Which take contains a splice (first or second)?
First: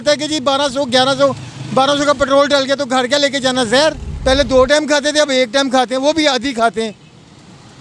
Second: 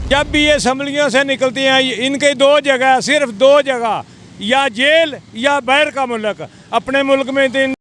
first